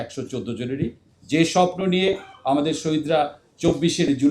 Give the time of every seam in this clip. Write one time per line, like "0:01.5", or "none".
0:01.1
0:03.4